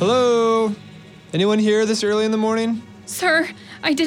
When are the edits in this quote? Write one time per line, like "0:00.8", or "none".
0:03.0